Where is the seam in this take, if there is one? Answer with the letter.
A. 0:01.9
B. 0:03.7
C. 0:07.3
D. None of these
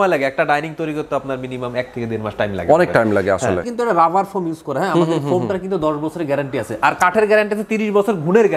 B